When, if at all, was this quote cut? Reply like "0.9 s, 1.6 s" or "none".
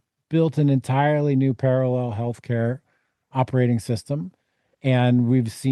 none